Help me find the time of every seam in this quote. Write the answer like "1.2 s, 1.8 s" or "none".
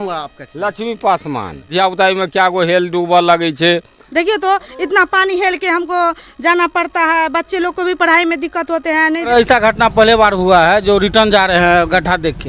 1.7 s, 4.0 s, 9.3 s